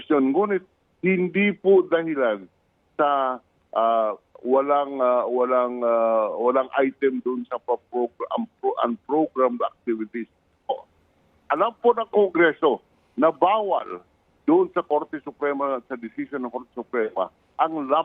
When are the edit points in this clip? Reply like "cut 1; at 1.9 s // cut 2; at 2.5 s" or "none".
cut 1; at 10.7 s